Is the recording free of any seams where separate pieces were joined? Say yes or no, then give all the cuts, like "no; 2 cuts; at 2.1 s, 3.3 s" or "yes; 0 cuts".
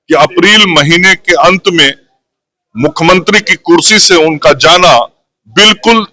yes; 0 cuts